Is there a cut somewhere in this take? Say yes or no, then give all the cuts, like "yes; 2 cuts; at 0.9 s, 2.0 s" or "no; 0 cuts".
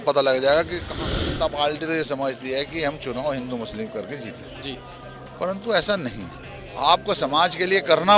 yes; 1 cut; at 0.9 s